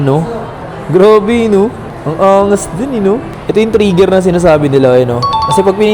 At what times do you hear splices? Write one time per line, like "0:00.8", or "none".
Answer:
none